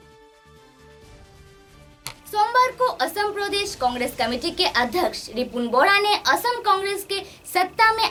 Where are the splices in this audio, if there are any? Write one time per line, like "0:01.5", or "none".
none